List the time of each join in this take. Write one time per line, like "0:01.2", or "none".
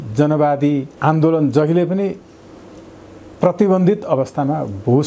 0:00.9